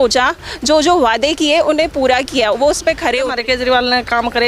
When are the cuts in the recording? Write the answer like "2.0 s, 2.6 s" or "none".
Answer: 3.3 s